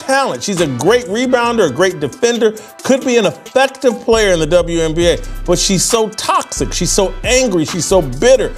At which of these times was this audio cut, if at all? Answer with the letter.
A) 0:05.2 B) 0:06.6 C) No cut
B